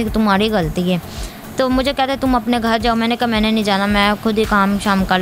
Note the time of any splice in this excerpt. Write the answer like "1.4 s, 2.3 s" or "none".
none